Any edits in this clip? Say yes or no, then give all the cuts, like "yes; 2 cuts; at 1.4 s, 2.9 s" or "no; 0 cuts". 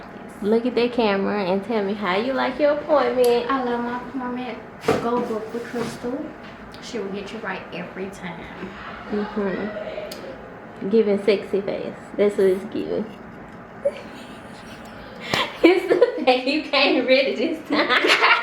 no; 0 cuts